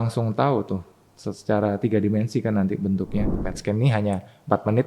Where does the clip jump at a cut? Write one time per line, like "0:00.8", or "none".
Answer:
0:03.3